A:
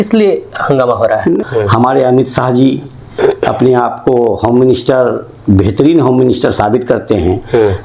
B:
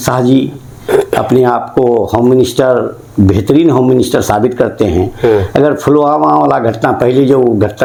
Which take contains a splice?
A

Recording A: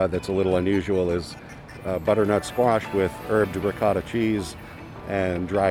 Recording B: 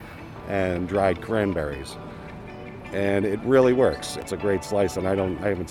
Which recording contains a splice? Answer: B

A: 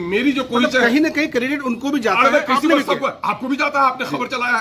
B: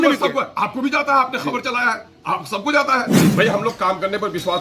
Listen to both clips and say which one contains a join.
B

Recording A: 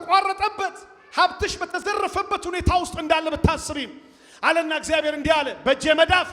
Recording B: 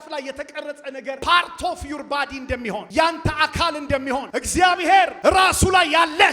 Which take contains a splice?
B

